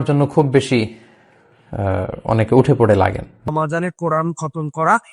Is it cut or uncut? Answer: cut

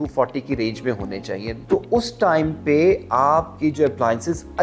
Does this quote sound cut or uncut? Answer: cut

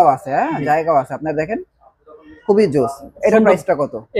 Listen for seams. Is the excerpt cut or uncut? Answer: uncut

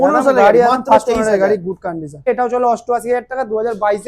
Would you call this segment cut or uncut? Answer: cut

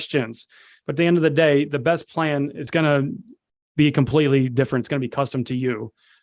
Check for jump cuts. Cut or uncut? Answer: cut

